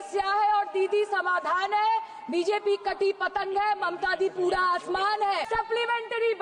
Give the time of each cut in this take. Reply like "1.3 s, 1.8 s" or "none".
5.4 s